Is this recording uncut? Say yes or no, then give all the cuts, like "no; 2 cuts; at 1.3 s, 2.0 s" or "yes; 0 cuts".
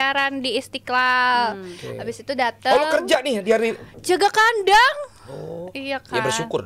yes; 0 cuts